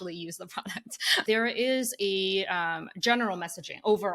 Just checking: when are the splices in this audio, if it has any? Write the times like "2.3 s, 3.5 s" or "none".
1.2 s